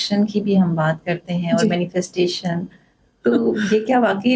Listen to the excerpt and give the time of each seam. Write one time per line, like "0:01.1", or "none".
none